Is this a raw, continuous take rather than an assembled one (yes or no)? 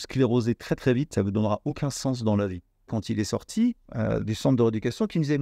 no